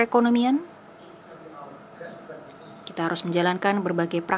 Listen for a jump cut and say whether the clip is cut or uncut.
cut